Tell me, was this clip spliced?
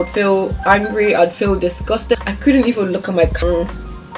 yes; 2 cuts; at 2.3 s, 3.4 s

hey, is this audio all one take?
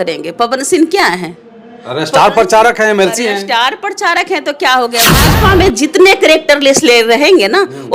no; 1 cut; at 5.2 s

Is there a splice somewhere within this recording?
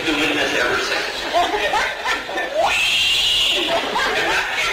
no; 0 cuts

